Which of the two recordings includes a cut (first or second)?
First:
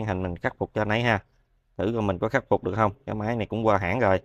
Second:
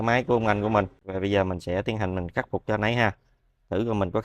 second